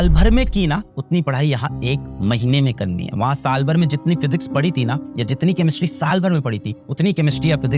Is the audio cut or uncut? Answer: uncut